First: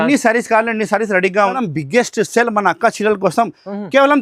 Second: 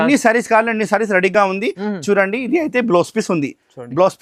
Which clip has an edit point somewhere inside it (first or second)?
first